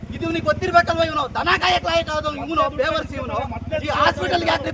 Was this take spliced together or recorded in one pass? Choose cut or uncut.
uncut